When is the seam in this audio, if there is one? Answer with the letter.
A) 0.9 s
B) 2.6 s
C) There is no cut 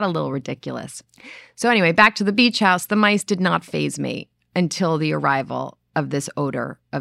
C